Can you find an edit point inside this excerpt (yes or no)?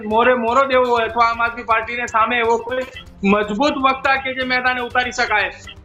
no